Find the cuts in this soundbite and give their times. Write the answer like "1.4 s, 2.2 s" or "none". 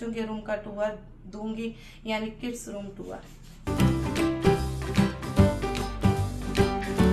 none